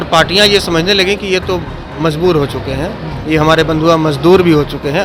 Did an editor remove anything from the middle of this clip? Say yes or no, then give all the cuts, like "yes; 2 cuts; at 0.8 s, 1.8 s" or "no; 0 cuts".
no; 0 cuts